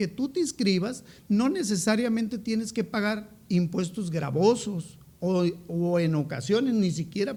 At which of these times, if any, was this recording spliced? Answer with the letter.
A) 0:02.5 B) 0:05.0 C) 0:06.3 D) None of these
D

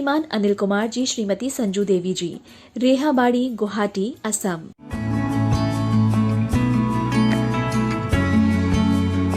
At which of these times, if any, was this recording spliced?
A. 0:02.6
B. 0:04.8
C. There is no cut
B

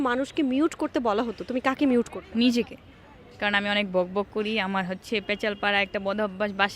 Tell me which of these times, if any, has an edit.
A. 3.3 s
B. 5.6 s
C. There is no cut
A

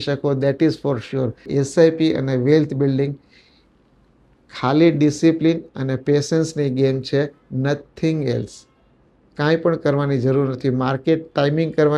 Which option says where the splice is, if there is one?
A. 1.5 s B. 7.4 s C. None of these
A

